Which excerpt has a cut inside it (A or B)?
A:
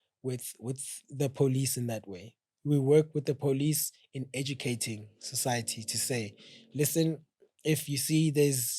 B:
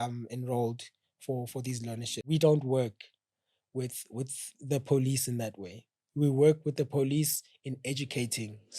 B